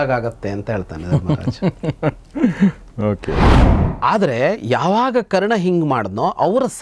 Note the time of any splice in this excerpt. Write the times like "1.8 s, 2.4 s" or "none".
3.6 s